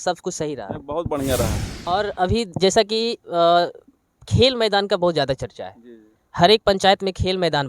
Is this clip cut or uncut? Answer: cut